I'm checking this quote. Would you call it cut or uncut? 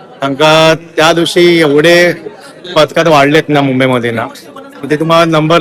uncut